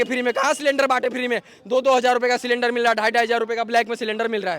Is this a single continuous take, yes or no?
yes